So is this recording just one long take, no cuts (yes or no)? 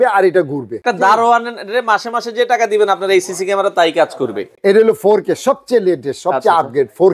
no